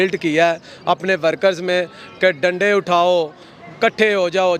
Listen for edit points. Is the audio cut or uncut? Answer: uncut